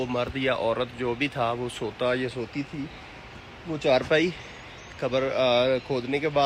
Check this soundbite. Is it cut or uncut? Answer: uncut